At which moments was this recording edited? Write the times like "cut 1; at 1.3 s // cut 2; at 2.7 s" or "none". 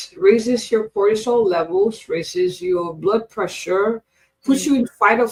none